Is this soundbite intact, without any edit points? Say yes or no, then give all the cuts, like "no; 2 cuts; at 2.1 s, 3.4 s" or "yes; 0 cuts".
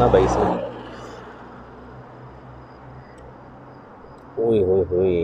yes; 0 cuts